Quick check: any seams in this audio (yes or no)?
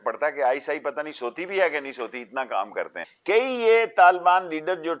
yes